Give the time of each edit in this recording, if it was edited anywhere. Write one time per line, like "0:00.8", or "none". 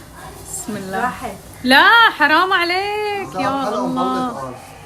none